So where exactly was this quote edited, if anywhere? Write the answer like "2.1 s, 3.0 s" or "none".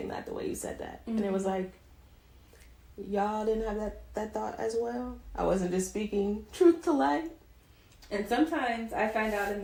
none